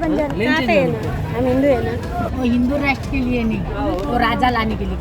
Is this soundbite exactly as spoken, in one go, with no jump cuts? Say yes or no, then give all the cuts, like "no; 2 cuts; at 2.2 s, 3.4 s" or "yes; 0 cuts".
no; 1 cut; at 2.3 s